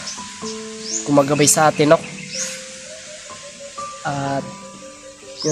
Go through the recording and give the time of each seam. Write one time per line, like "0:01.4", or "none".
none